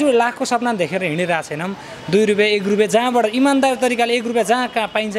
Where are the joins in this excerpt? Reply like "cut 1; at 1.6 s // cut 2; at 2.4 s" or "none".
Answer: none